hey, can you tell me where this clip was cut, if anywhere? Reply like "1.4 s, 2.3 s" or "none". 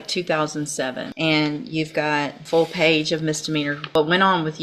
1.1 s, 2.4 s, 3.8 s